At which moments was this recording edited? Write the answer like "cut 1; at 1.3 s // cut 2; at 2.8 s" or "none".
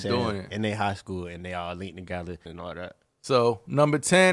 cut 1; at 2.5 s